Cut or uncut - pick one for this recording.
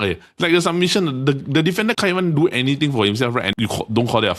cut